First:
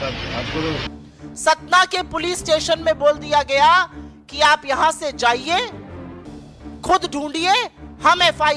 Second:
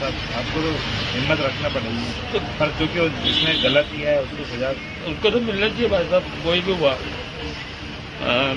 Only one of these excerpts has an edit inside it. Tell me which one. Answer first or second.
first